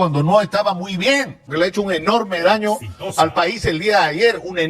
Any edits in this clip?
yes; 1 cut; at 1.4 s

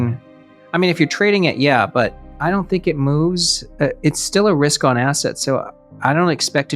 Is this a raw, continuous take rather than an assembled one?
no; 1 cut; at 2.3 s

